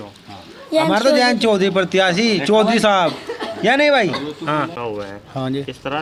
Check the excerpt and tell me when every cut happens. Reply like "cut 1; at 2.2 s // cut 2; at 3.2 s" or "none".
none